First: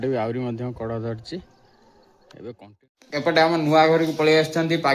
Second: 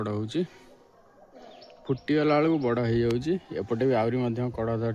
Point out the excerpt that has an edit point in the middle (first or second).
first